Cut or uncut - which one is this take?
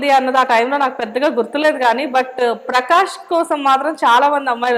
uncut